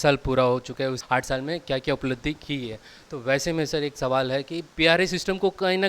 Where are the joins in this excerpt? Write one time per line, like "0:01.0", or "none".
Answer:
0:01.0
0:04.6